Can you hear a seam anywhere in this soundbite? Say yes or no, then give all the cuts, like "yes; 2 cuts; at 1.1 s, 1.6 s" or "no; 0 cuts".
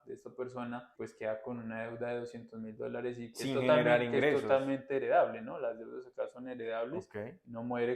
yes; 1 cut; at 0.9 s